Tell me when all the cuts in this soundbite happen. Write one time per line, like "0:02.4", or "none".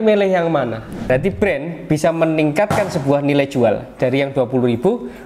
0:01.1